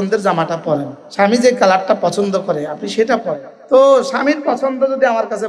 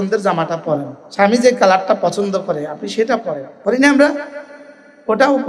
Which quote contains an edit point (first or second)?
first